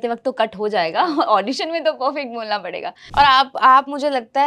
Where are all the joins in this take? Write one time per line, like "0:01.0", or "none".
0:03.0